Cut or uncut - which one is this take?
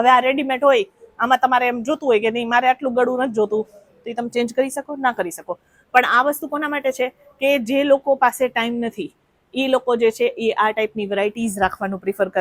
uncut